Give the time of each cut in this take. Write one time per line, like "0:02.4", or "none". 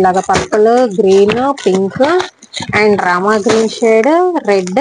none